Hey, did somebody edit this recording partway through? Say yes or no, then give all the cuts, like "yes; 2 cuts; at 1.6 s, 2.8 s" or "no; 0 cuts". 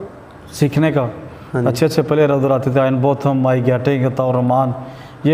no; 0 cuts